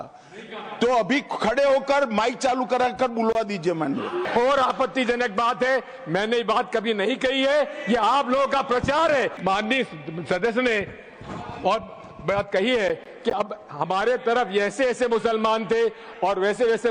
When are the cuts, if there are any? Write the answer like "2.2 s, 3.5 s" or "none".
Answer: 4.3 s, 9.4 s